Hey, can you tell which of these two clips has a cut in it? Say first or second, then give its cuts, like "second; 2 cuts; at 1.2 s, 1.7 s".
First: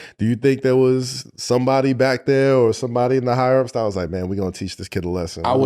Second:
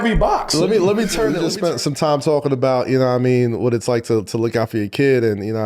second; 1 cut; at 1.4 s